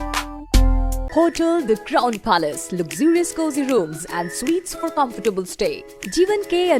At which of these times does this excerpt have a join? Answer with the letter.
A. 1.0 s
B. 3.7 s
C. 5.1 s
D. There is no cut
A